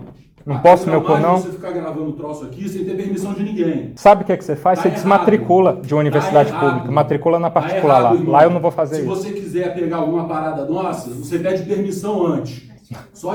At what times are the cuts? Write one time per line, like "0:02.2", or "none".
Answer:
none